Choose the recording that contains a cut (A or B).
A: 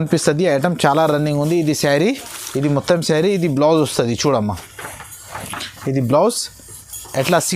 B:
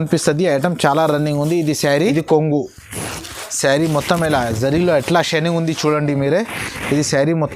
B